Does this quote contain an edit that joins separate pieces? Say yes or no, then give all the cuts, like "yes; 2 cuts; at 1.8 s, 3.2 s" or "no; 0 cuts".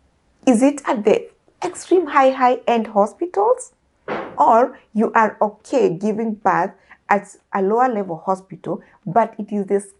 no; 0 cuts